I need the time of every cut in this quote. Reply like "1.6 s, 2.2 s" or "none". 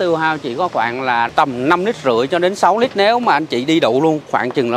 1.3 s